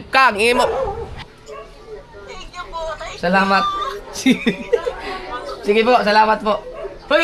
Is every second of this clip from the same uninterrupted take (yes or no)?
no